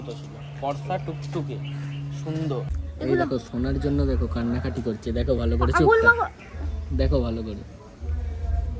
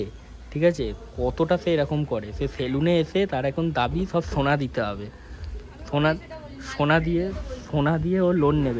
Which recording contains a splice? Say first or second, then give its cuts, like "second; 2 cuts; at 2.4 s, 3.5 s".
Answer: first; 1 cut; at 2.7 s